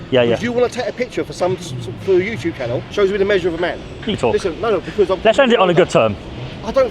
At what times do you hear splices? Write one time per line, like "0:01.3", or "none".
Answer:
0:02.9
0:04.2